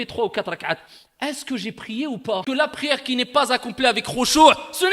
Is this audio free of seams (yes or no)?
no